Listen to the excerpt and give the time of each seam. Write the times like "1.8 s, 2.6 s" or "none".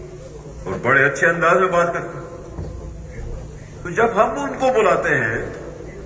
none